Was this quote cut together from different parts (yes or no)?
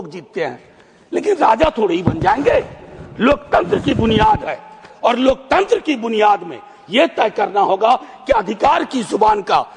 no